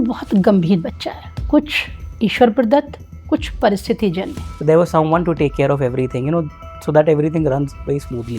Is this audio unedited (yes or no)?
no